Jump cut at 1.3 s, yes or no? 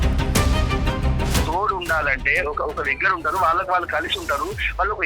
yes